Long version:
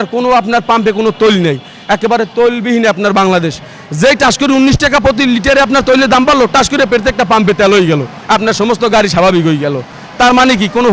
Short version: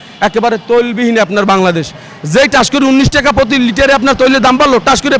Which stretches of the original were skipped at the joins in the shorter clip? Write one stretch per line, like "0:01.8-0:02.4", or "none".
none